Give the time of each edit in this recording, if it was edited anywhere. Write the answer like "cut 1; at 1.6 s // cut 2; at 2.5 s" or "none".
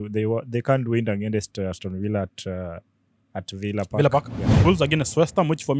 cut 1; at 4.6 s